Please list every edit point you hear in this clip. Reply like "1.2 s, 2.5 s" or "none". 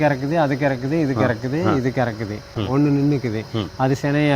2.5 s